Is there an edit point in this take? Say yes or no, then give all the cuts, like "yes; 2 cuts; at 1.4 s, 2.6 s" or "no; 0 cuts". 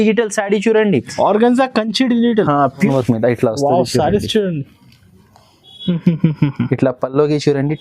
yes; 1 cut; at 2.9 s